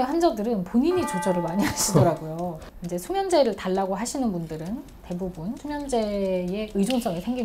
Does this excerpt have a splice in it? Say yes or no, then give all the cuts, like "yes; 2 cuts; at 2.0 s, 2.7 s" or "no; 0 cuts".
yes; 1 cut; at 2.6 s